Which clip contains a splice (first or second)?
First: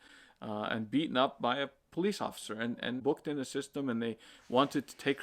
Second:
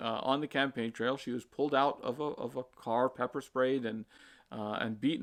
first